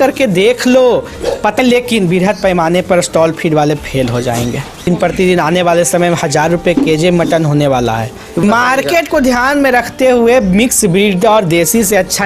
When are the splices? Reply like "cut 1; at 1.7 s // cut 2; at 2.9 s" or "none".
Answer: cut 1; at 1.6 s // cut 2; at 4.9 s // cut 3; at 8.4 s